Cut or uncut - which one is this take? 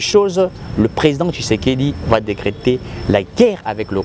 uncut